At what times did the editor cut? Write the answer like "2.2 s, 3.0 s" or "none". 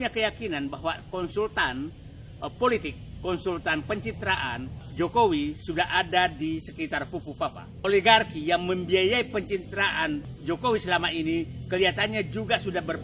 4.8 s, 7.9 s, 10.3 s